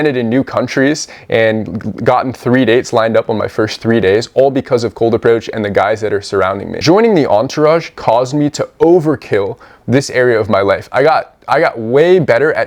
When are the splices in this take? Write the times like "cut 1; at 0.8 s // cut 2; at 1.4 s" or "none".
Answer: cut 1; at 6.8 s